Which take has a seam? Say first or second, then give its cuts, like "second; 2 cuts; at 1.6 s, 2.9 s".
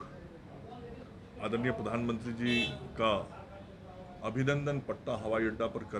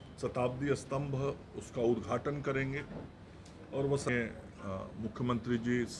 second; 1 cut; at 4.1 s